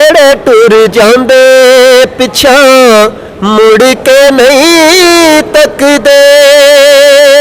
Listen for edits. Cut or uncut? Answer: uncut